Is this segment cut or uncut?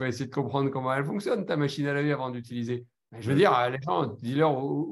uncut